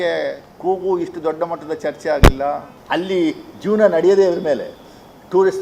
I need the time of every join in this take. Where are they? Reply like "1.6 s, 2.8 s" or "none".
2.7 s